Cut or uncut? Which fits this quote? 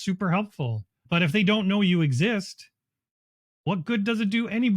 cut